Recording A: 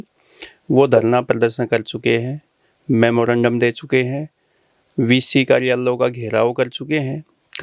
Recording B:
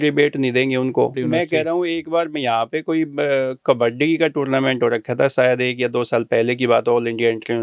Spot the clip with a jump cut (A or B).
B